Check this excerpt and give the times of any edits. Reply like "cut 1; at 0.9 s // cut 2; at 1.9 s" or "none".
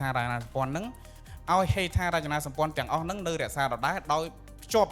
none